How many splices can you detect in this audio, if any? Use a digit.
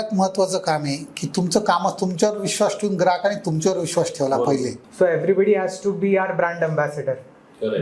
1